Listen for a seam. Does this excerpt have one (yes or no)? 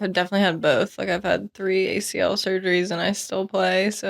no